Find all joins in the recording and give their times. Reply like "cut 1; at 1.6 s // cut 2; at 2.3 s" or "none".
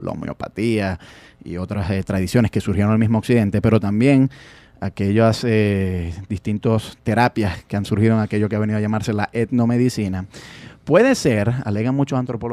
none